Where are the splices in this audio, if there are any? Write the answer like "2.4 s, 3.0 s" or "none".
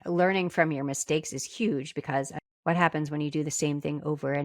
2.3 s